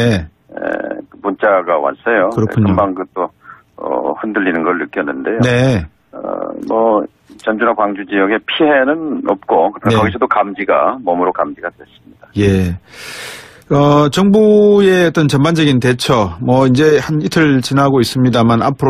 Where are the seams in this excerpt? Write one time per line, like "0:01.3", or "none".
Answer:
0:04.3

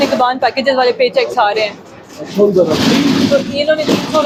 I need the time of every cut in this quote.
none

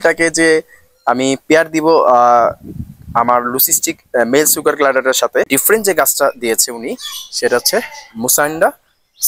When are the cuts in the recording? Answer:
0:05.5

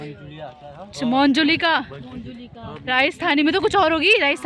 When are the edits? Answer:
none

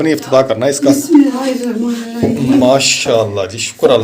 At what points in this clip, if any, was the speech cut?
0:01.3

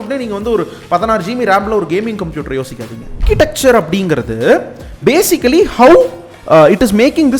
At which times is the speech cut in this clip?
0:03.1

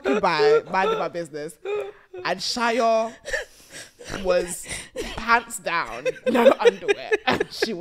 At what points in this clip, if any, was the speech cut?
none

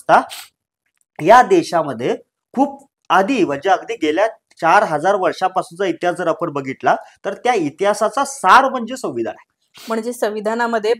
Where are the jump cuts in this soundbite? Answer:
none

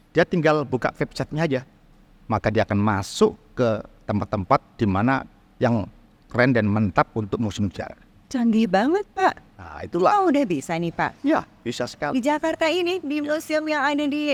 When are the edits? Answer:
none

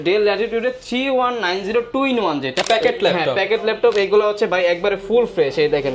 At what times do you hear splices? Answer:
0:02.6

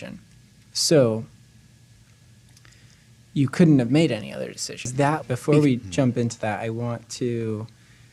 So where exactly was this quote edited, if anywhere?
0:05.2

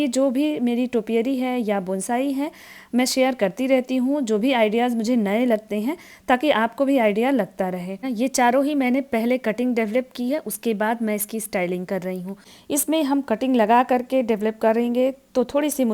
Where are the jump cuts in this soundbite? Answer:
0:08.1
0:12.5

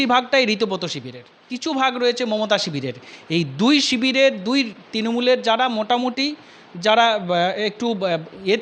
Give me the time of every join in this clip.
0:01.5

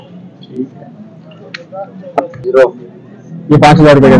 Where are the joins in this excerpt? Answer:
0:02.3

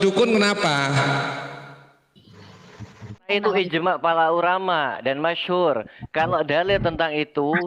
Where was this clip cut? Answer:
0:03.3

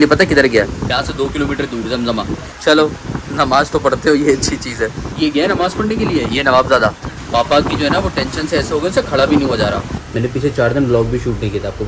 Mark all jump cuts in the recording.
0:00.8
0:02.4
0:05.1
0:07.1
0:10.0

